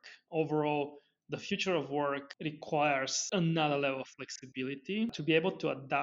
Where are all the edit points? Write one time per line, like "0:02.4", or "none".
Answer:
0:02.3
0:03.2
0:05.1